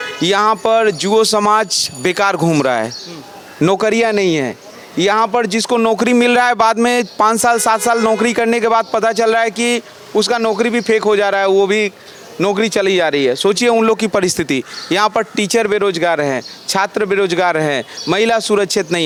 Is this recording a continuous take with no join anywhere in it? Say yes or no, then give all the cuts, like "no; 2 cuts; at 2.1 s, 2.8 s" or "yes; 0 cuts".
yes; 0 cuts